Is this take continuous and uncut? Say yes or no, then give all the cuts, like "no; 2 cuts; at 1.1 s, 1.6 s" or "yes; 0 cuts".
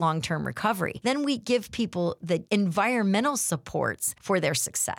no; 3 cuts; at 0.9 s, 2.3 s, 4.1 s